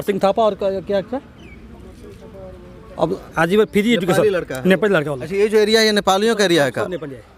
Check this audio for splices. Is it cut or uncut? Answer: uncut